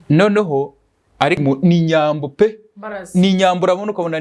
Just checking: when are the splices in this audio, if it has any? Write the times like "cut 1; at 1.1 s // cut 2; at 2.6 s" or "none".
cut 1; at 1.4 s